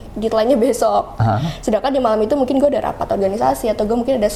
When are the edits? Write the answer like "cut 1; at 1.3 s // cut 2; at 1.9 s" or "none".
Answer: none